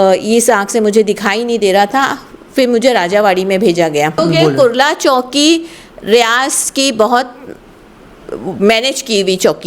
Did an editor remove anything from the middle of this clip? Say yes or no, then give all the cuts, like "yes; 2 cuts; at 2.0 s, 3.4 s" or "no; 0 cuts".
yes; 1 cut; at 4.2 s